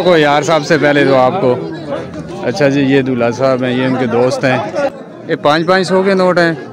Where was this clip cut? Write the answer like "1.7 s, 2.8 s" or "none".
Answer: 4.9 s